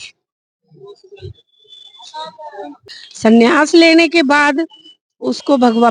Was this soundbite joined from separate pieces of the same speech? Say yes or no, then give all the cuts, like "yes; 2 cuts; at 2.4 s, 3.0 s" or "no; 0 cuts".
yes; 1 cut; at 2.9 s